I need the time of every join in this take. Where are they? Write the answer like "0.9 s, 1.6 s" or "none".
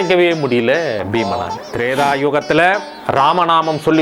1.6 s